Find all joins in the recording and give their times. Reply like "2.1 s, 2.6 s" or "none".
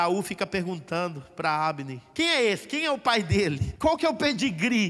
2.0 s, 3.7 s